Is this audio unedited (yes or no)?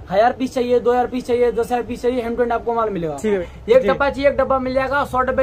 no